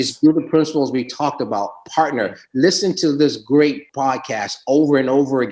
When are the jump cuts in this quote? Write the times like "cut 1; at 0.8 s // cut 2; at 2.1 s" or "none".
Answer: cut 1; at 3.9 s